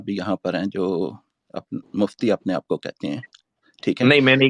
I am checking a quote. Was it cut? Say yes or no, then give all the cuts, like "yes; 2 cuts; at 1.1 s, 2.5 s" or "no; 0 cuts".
no; 0 cuts